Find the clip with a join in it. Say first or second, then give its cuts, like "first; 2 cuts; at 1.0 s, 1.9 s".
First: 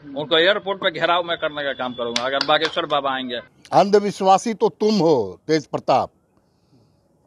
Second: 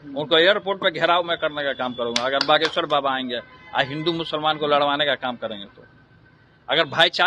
first; 1 cut; at 3.6 s